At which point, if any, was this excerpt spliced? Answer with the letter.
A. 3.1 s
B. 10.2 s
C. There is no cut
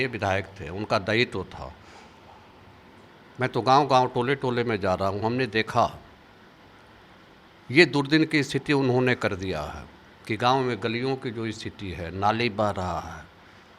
C